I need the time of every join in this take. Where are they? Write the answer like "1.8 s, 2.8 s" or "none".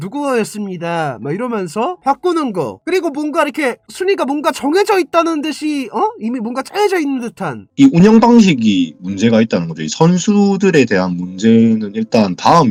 none